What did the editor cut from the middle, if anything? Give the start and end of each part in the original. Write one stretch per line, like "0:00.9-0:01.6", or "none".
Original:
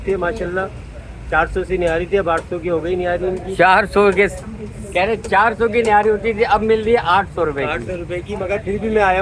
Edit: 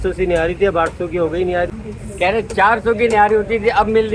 0:03.2-0:04.4